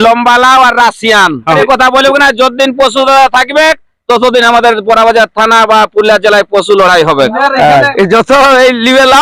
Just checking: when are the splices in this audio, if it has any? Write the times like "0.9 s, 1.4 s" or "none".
1.6 s, 7.9 s